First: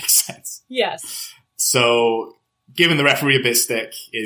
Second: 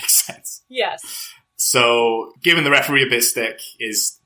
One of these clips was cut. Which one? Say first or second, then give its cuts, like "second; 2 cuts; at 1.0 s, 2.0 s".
second; 1 cut; at 2.3 s